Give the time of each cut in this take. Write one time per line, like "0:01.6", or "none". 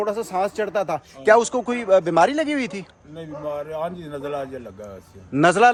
none

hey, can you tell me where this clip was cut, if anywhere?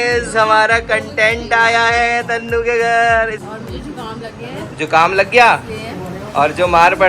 0:03.4

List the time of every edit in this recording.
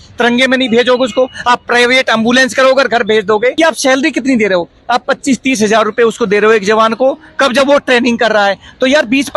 0:03.5

